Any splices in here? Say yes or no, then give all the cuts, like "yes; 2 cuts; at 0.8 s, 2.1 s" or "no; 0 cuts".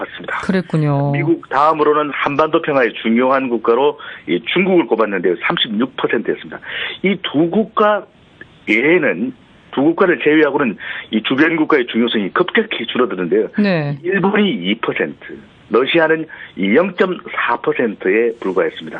yes; 1 cut; at 11.5 s